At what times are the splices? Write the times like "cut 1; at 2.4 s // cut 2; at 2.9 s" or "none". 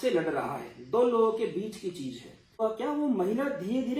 cut 1; at 2.6 s